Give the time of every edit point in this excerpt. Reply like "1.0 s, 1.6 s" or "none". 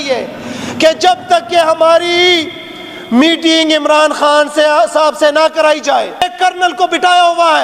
6.3 s